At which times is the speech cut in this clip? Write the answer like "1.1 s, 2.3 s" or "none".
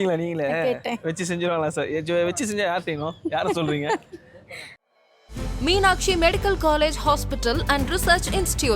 4.8 s

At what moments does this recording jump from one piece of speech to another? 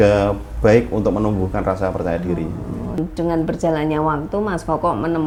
none

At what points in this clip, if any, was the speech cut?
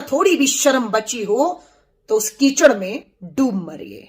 3.1 s

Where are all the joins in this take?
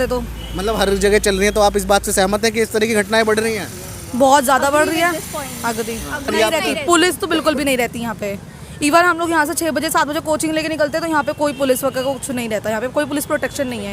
6.3 s

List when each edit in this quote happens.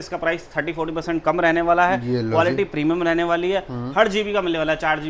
none

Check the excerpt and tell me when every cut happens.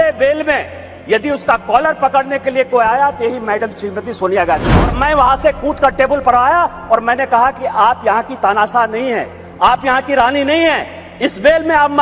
4.9 s

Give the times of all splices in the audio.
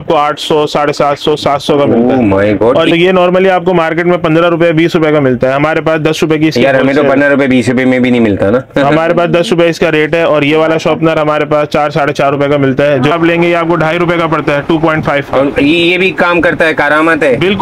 2.9 s, 13.1 s

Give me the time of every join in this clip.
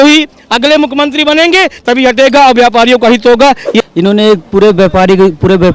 3.8 s

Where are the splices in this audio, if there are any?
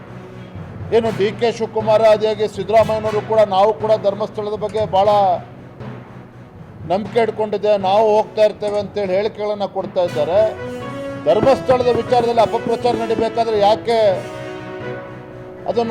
0.9 s

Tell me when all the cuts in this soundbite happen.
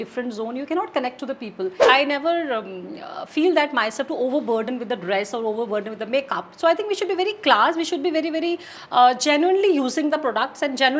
1.8 s

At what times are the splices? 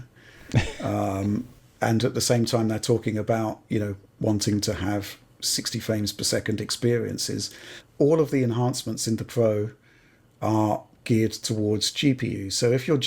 2.0 s

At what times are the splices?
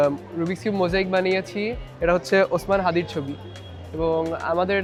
none

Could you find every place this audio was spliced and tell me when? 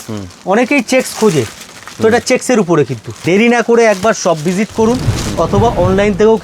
3.1 s

